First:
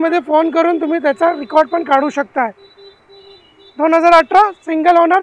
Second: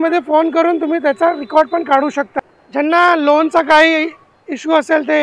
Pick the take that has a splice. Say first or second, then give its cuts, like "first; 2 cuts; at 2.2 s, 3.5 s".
second; 1 cut; at 2.3 s